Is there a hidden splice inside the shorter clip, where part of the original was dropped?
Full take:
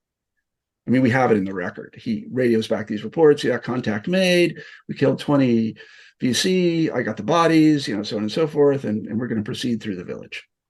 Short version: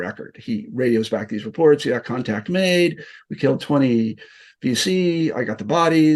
no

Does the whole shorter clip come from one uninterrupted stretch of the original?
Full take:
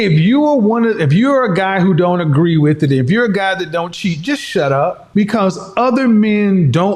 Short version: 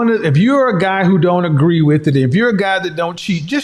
yes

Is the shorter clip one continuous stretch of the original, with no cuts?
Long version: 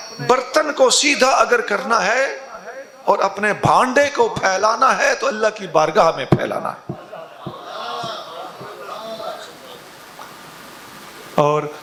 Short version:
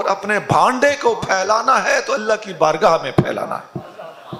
yes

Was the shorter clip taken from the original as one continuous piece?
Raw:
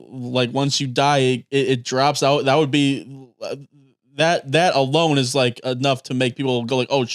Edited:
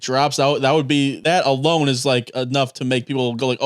no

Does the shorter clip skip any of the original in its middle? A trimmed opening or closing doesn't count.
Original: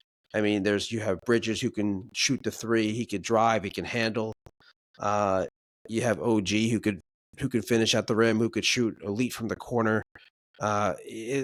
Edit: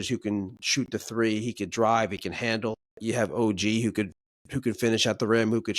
yes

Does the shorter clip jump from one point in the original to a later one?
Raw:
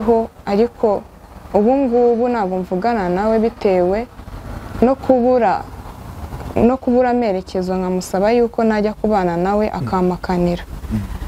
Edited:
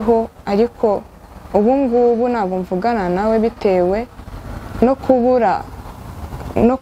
no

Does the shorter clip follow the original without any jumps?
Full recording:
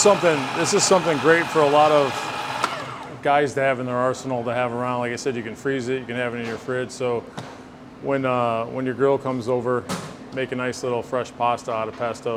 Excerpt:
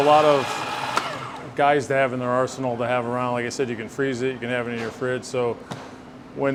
yes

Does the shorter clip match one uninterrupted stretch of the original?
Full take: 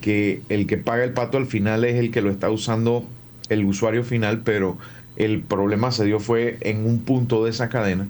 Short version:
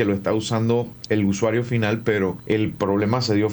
no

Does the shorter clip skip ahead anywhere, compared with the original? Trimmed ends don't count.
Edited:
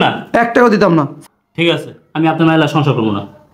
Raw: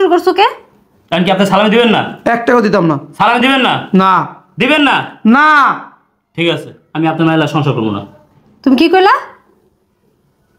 yes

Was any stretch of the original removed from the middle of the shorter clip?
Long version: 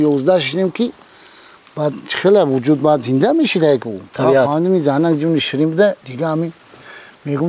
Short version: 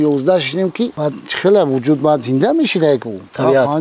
yes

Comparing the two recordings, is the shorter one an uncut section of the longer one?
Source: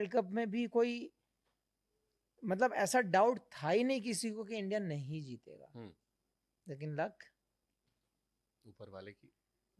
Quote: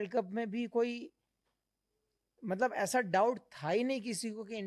yes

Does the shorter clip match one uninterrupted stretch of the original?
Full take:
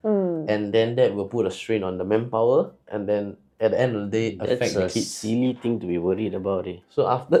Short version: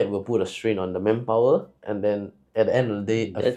yes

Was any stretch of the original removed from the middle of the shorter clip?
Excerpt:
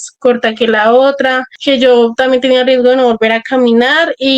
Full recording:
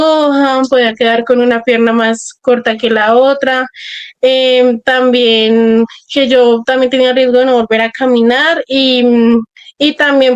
yes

